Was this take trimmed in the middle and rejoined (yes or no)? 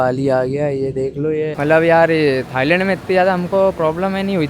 yes